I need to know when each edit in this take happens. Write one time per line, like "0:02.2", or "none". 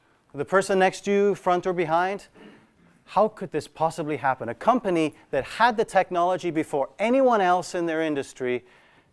0:04.8